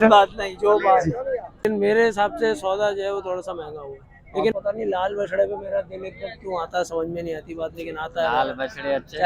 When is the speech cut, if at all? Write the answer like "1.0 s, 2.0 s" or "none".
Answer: 1.5 s, 4.5 s